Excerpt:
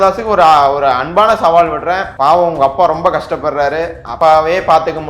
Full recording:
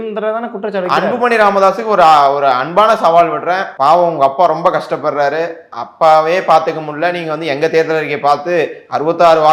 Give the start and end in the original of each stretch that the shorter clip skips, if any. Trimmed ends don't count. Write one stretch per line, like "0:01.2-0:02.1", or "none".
0:05.6-0:05.8

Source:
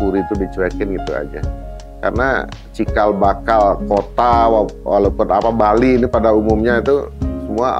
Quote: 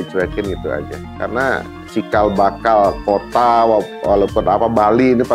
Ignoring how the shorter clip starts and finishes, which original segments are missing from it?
0:01.4-0:01.8

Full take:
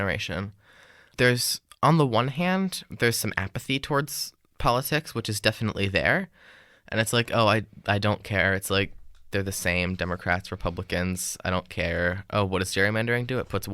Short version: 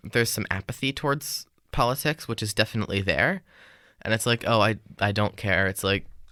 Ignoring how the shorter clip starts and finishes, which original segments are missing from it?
none

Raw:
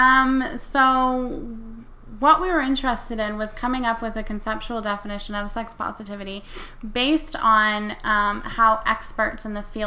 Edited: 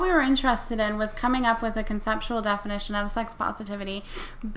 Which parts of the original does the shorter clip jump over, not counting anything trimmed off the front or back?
none

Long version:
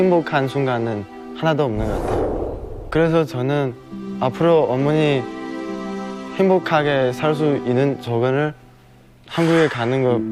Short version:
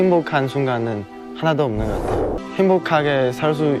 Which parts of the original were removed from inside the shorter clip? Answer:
0:02.4-0:06.2

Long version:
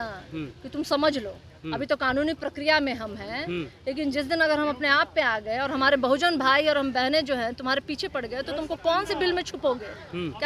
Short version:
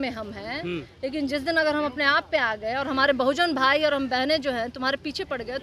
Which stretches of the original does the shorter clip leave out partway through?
none

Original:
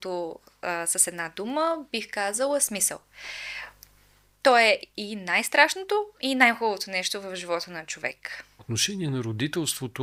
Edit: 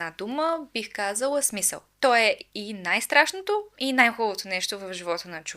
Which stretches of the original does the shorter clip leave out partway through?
0:03.0-0:04.2

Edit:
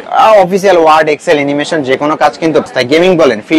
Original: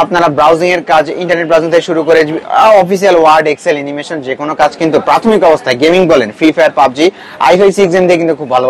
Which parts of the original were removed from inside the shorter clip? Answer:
0:05.1-0:05.6

